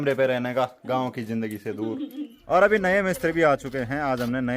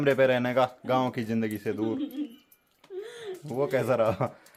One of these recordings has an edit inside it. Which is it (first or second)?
first